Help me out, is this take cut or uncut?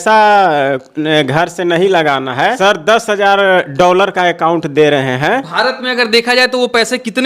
cut